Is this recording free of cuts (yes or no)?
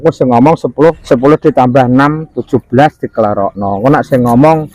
no